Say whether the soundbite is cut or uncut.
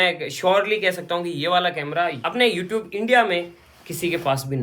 uncut